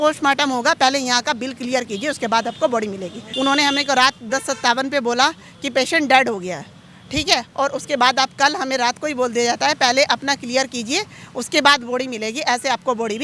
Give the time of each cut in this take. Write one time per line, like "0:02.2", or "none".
0:03.2